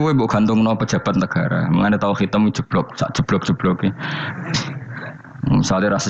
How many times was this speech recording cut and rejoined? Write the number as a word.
one